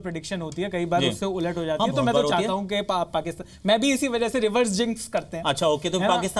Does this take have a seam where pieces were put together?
no; 0 cuts

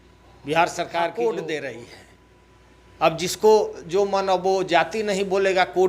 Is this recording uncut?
no; 1 cut; at 1.1 s

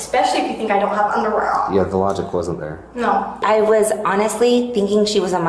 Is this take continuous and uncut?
no; 1 cut; at 3.4 s

